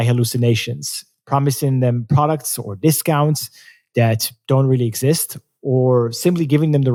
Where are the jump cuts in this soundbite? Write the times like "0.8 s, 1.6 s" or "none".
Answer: none